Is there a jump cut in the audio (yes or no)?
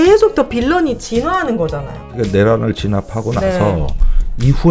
yes